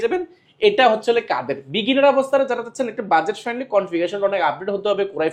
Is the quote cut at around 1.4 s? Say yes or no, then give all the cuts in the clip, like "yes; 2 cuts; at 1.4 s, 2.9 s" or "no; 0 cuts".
no; 0 cuts